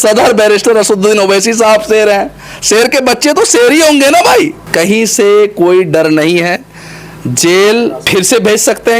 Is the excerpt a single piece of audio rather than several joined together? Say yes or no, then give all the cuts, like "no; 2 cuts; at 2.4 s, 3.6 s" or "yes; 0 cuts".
no; 2 cuts; at 4.6 s, 8.1 s